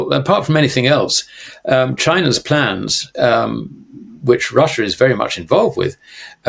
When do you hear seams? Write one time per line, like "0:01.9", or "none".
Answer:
none